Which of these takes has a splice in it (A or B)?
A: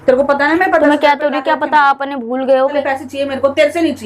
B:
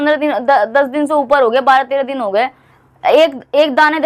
A